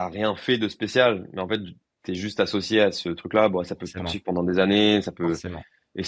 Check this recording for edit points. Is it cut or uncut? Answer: uncut